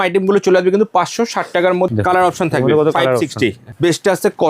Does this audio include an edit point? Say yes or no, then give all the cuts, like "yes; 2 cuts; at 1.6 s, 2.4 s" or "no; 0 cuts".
yes; 2 cuts; at 1.9 s, 3.7 s